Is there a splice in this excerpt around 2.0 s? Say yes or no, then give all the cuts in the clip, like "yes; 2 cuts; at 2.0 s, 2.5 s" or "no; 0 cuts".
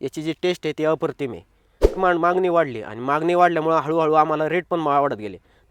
yes; 1 cut; at 2.0 s